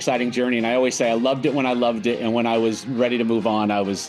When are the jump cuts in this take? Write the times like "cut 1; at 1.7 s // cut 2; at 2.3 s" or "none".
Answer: none